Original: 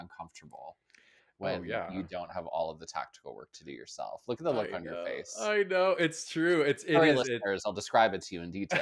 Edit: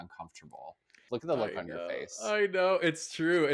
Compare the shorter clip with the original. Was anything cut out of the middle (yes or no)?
yes